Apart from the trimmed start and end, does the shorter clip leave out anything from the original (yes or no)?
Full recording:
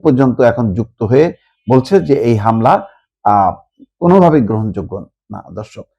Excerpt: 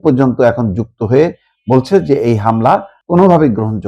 yes